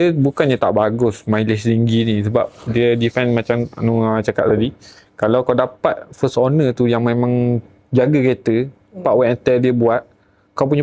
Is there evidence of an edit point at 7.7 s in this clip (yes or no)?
no